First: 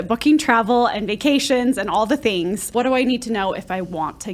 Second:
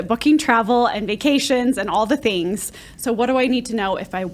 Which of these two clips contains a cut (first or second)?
first